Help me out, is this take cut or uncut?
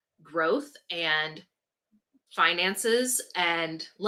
uncut